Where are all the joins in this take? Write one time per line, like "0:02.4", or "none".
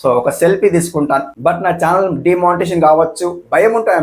0:01.4